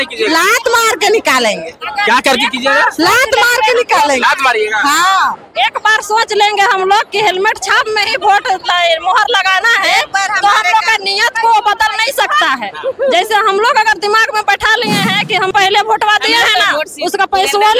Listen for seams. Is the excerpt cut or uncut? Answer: cut